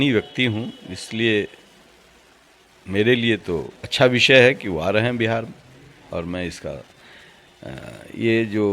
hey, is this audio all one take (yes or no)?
no